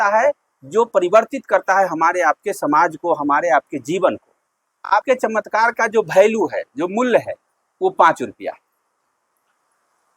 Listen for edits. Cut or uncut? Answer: cut